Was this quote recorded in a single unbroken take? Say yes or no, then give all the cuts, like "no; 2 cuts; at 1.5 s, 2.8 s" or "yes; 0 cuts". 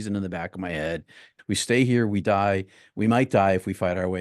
no; 1 cut; at 1.3 s